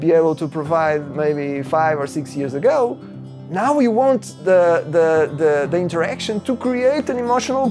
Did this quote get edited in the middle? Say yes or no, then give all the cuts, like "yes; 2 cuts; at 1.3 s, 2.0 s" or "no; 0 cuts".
no; 0 cuts